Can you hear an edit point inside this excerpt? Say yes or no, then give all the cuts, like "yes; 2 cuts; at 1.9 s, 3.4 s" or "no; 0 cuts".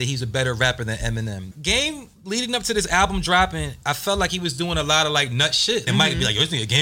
yes; 2 cuts; at 1.5 s, 5.9 s